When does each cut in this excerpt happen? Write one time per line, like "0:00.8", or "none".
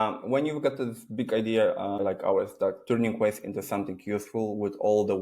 0:02.0